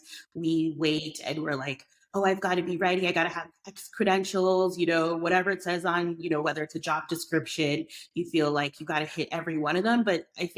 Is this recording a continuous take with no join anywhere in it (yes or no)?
yes